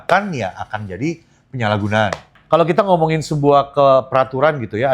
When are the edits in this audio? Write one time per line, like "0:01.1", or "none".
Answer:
0:02.3